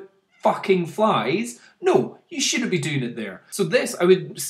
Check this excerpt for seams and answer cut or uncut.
cut